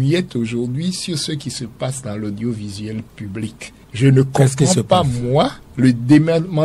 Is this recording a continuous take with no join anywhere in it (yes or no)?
yes